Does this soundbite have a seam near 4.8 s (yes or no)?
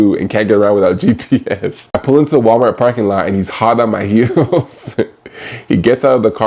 no